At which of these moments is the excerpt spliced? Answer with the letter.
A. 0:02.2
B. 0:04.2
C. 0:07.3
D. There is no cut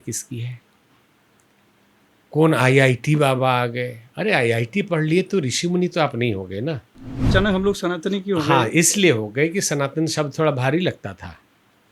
C